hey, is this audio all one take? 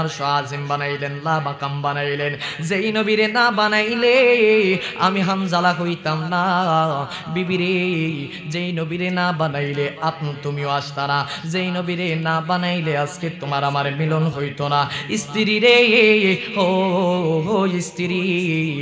yes; 0 cuts

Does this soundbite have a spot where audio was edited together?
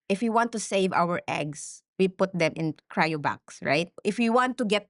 yes; 1 cut; at 4.0 s

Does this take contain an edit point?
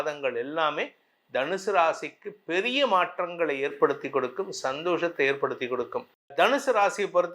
yes; 1 cut; at 6.3 s

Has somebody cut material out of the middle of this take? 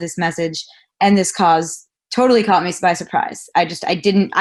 no; 0 cuts

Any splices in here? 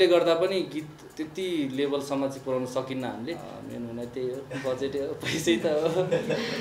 yes; 1 cut; at 3.5 s

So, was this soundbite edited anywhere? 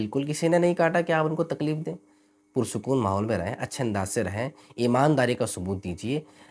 no; 0 cuts

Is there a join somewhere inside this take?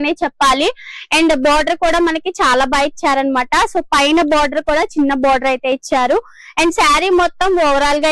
no; 0 cuts

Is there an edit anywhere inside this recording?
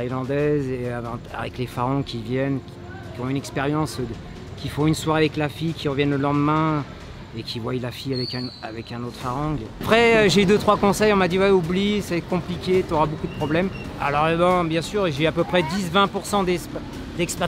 yes; 2 cuts; at 9.8 s, 13.9 s

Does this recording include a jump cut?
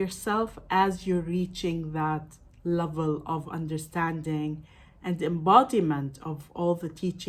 no; 0 cuts

